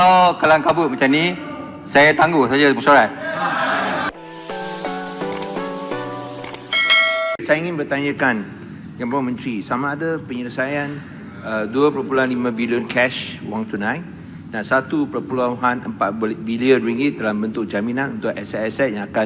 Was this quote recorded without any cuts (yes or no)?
no